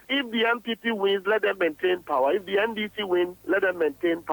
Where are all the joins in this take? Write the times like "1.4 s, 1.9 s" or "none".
3.4 s